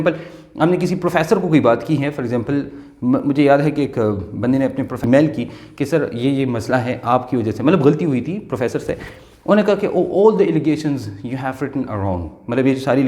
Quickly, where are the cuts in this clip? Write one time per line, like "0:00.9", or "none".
0:05.0